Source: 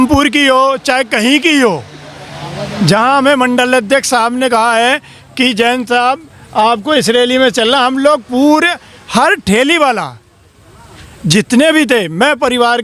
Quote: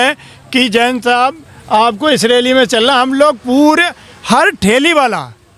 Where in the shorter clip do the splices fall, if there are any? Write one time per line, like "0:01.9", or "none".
none